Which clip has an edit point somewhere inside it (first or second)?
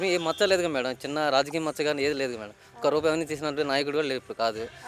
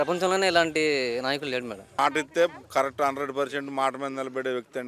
second